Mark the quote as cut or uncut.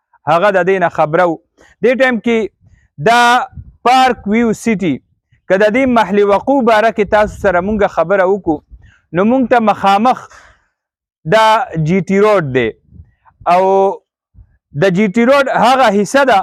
uncut